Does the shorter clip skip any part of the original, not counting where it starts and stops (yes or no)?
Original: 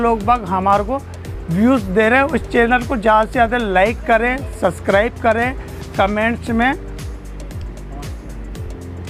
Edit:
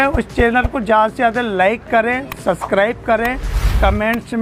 no